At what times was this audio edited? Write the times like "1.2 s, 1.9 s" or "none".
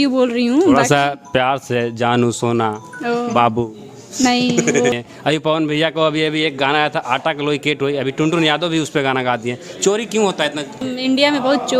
4.9 s, 10.8 s